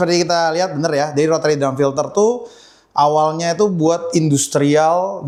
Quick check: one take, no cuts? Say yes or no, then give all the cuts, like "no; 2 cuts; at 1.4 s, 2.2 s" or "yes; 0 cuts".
yes; 0 cuts